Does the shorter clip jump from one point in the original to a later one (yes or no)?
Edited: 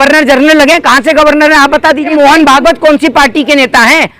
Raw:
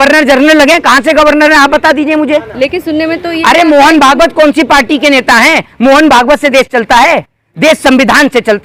yes